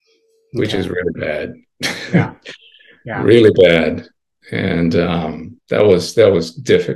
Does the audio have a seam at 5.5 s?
yes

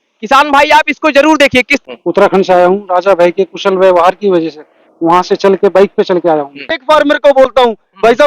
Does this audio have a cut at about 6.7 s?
yes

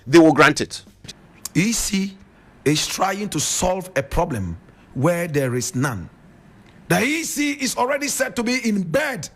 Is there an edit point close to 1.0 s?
yes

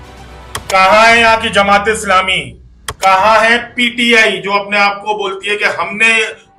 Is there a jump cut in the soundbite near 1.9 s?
no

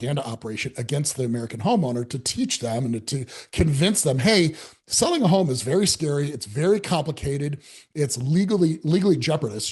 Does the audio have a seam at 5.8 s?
no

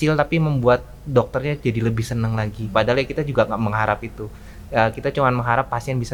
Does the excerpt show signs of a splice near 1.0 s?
no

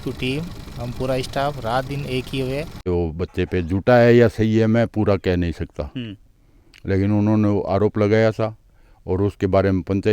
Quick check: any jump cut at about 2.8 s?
yes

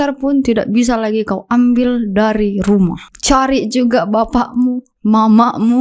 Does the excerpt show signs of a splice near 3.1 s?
yes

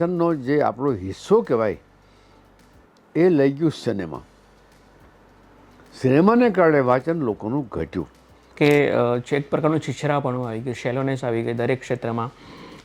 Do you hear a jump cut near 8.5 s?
yes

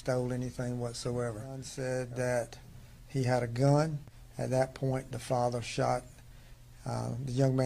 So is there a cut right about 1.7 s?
yes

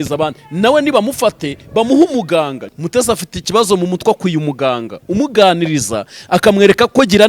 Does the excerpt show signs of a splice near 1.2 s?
no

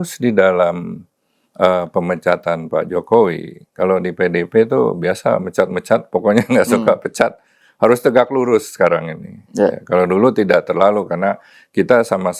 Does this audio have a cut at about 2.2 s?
no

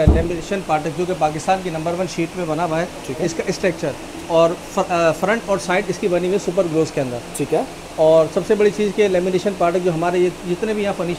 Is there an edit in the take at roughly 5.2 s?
no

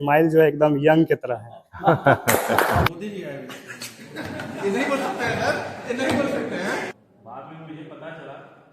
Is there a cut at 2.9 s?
yes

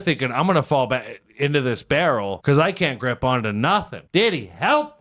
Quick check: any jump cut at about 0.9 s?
no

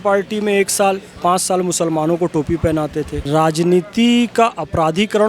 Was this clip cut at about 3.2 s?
yes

